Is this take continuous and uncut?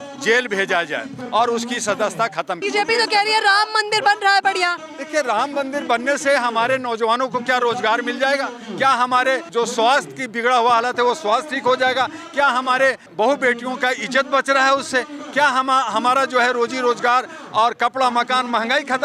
no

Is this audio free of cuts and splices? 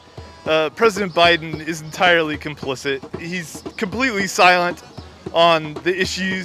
no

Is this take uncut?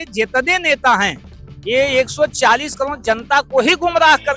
yes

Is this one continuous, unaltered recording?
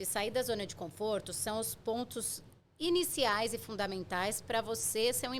yes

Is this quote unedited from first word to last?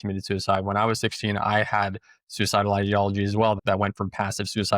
no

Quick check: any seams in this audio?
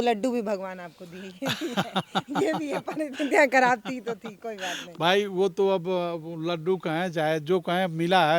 no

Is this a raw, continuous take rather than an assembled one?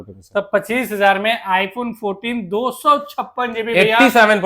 yes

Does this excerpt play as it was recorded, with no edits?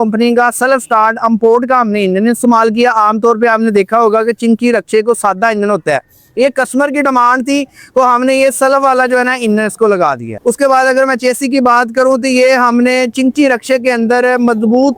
yes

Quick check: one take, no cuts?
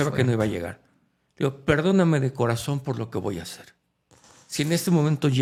yes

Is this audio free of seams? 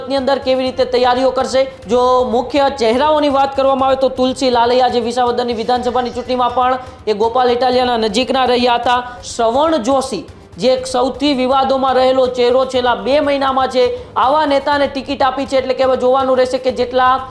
no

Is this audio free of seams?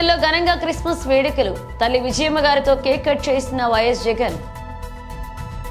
yes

